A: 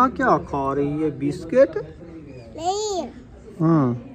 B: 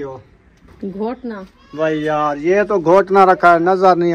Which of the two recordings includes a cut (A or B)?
B